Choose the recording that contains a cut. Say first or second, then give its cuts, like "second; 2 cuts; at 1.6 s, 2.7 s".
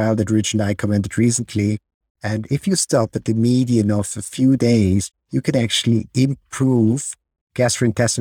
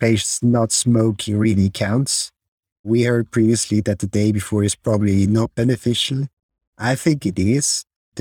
first; 1 cut; at 5.1 s